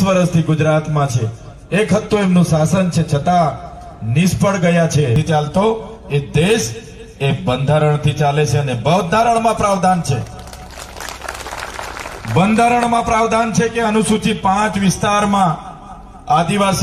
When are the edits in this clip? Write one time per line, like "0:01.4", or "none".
0:05.2